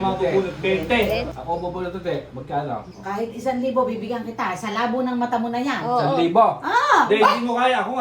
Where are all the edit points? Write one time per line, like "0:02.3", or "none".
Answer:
0:01.3
0:02.9